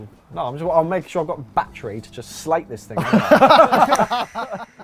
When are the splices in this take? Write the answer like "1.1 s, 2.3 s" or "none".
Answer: none